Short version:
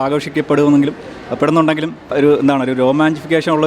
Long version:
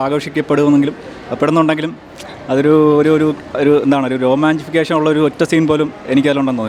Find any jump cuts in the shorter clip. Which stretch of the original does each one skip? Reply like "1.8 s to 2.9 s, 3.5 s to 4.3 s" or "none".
2.0 s to 3.5 s